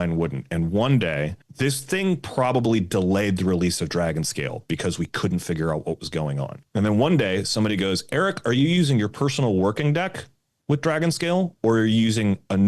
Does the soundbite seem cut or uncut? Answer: cut